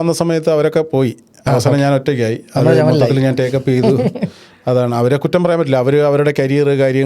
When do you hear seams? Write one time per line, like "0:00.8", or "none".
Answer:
none